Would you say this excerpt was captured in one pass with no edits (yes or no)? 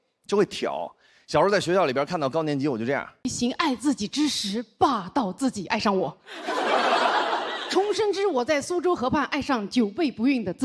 no